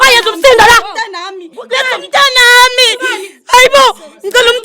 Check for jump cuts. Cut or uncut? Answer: cut